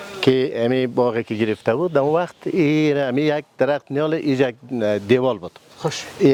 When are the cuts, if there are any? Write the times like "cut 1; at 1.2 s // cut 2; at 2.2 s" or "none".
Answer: none